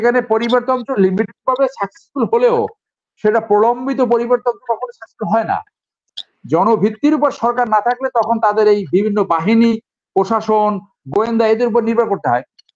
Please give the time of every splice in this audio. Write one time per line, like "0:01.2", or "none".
0:06.0